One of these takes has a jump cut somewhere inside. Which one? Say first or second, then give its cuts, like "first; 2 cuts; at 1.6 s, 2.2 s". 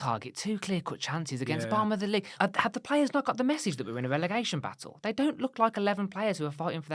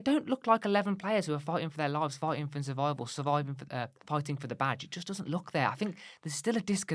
first; 1 cut; at 2.3 s